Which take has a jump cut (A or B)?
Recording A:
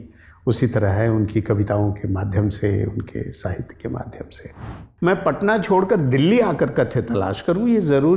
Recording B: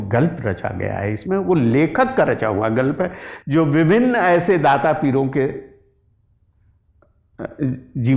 A